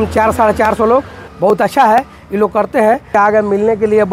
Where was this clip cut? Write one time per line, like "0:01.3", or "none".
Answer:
0:01.2
0:03.2

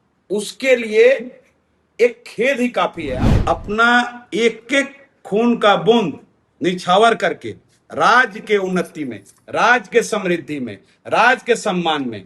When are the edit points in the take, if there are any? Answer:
0:03.1

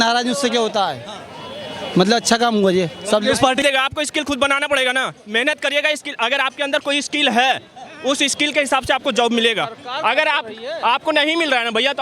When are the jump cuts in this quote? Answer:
0:03.6

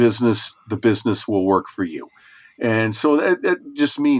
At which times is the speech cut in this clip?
none

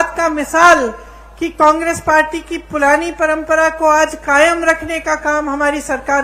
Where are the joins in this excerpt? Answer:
none

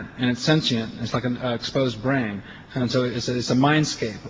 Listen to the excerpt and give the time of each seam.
none

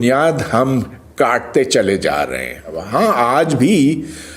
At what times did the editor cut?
0:02.8

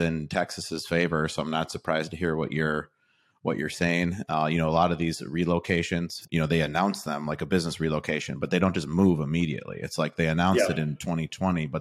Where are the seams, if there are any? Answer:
0:06.2

